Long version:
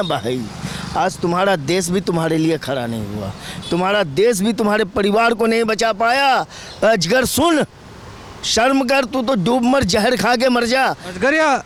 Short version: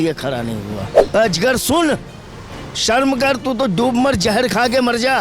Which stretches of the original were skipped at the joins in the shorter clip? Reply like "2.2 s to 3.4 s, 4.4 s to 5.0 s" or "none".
3.4 s to 6.6 s